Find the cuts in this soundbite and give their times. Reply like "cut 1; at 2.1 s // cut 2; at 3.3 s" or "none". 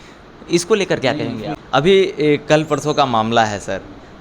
cut 1; at 1.5 s

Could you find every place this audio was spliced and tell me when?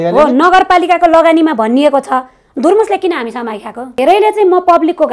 cut 1; at 4.0 s

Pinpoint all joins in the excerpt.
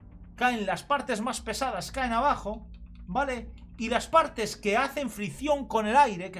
none

